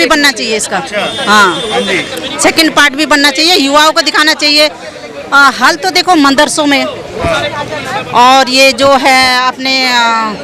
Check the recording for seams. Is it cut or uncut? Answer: uncut